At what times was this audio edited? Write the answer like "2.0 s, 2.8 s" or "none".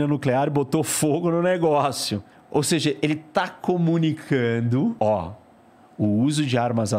2.3 s, 5.0 s